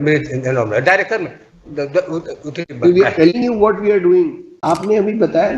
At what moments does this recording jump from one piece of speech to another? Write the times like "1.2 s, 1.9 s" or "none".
4.5 s